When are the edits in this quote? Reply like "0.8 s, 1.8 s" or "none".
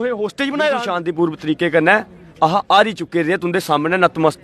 1.0 s